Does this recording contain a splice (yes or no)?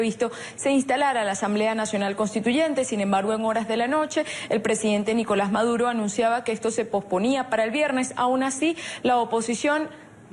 yes